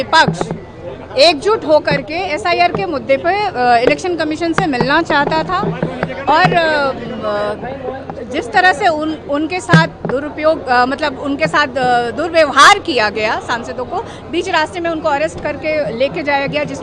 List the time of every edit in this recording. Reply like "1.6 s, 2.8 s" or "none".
none